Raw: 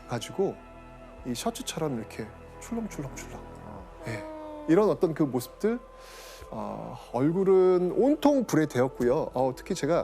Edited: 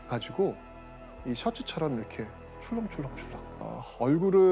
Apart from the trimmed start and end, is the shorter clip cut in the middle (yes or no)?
yes